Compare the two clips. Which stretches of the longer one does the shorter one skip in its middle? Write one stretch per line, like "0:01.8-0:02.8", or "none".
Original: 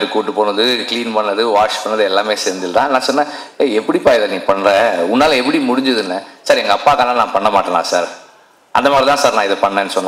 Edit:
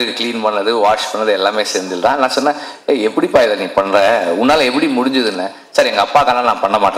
none